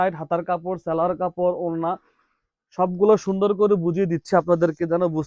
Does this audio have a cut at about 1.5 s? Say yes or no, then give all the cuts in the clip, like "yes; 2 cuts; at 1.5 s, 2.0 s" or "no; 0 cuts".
no; 0 cuts